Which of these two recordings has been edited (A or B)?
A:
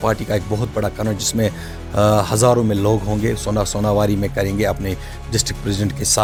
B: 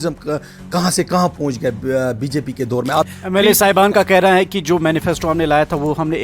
B